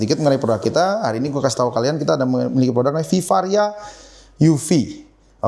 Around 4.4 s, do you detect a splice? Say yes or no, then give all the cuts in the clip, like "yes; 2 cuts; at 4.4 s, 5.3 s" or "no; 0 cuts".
no; 0 cuts